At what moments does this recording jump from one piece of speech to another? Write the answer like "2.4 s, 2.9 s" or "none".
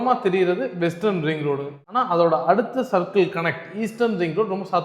1.7 s

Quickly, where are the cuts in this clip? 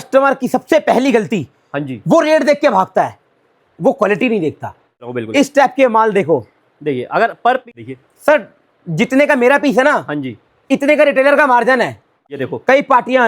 5.1 s, 7.7 s, 12.1 s

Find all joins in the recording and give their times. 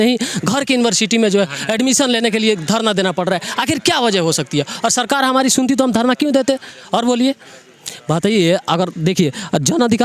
none

